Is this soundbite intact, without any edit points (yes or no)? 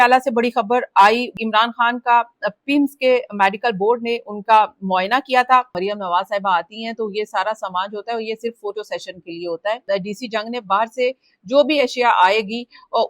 no